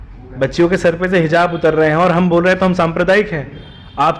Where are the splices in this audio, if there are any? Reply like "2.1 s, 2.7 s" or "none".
none